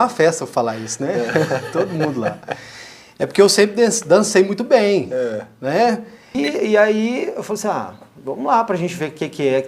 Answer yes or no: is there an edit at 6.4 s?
yes